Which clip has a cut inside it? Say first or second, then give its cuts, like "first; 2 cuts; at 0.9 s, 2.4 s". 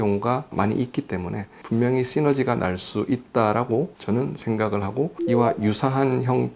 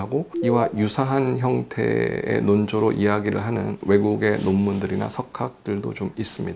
first; 1 cut; at 1.6 s